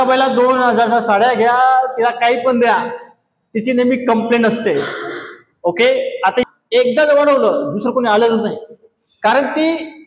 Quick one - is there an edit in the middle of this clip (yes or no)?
yes